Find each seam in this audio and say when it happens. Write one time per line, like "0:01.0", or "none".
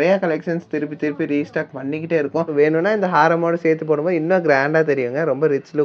0:02.5